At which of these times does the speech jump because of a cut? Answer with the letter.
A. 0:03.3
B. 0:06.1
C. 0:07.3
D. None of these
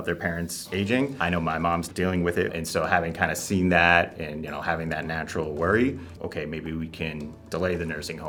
D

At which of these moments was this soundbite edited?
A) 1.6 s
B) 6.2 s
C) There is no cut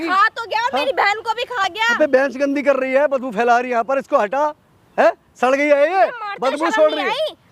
A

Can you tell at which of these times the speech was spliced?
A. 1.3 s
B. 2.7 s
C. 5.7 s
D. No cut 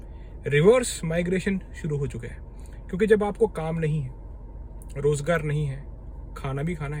D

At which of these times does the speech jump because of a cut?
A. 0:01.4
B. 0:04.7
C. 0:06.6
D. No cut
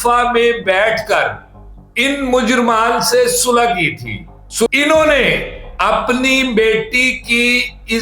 B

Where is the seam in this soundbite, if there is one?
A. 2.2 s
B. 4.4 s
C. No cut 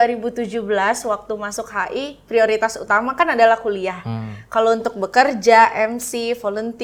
C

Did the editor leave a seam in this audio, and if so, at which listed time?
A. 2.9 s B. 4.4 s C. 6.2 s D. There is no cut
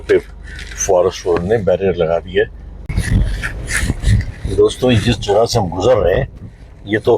A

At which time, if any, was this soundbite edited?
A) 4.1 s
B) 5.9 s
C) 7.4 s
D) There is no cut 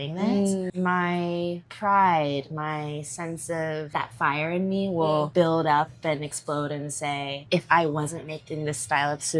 C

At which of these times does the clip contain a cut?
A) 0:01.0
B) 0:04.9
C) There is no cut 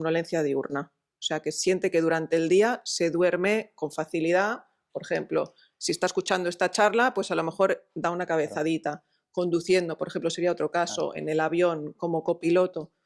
C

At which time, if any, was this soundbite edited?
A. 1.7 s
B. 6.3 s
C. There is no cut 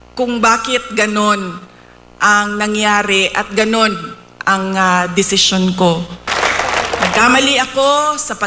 B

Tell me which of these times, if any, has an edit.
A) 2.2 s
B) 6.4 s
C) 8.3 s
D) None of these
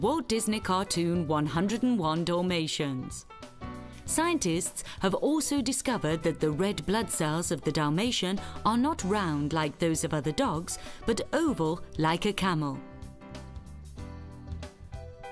D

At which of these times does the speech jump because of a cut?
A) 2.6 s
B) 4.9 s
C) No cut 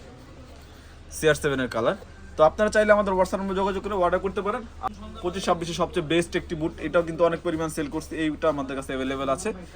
B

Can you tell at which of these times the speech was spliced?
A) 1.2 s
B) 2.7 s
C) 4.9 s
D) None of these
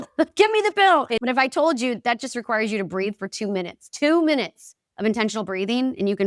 A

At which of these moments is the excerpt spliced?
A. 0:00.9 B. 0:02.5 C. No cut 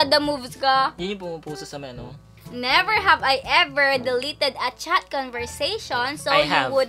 B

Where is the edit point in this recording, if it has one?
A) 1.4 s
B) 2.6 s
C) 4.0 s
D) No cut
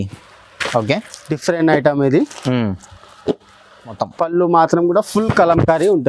C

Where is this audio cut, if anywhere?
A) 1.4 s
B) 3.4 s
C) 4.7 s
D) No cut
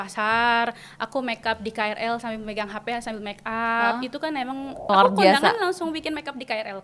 C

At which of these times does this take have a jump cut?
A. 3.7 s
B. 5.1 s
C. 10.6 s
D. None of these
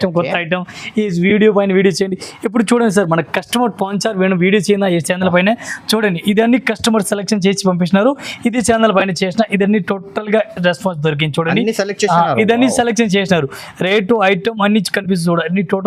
D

